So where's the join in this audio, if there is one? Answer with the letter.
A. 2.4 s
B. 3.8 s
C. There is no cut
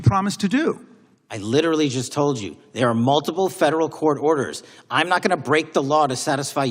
C